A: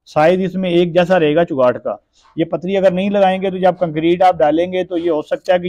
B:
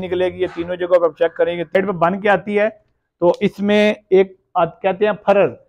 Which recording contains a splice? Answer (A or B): B